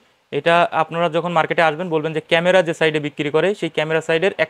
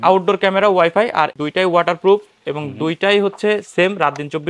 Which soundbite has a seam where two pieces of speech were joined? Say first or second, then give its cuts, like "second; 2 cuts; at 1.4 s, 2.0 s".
second; 1 cut; at 1.4 s